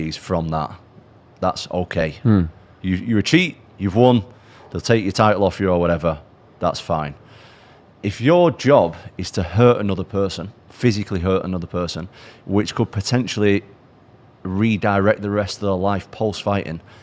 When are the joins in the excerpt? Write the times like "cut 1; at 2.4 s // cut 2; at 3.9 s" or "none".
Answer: cut 1; at 6.4 s